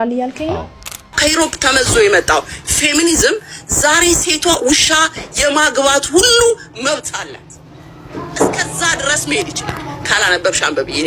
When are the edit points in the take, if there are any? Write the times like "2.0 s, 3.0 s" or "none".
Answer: 1.1 s